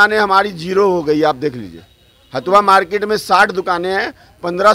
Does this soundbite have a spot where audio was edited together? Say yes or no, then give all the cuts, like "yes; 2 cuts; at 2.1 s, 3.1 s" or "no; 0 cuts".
no; 0 cuts